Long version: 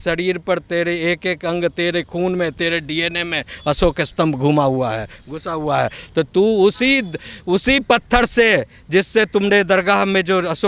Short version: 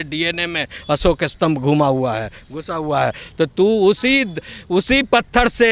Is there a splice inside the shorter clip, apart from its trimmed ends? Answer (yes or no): no